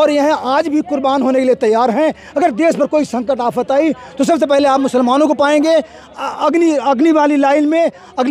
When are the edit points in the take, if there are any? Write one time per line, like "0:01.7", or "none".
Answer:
none